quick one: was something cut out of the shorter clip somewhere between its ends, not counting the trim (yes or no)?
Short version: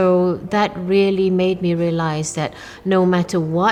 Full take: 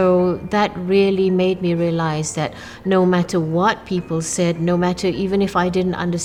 no